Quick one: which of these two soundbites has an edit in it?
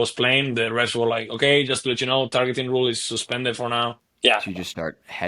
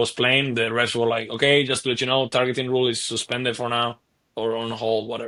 first; 1 cut; at 4.0 s

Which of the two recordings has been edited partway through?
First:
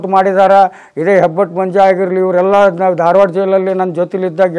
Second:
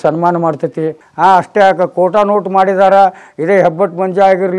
second; 1 cut; at 1.0 s

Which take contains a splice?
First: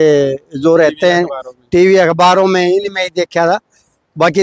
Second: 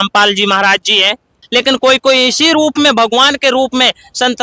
second; 1 cut; at 1.4 s

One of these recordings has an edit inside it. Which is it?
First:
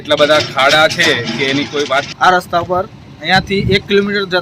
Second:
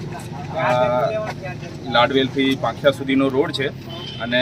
first; 1 cut; at 2.1 s

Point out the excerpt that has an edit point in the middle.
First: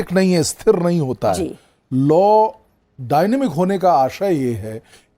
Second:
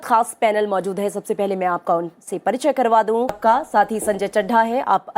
second; 1 cut; at 3.4 s

